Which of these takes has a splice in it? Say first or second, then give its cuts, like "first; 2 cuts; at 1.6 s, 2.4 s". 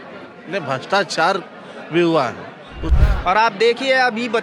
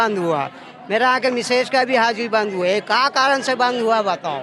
first; 1 cut; at 2.9 s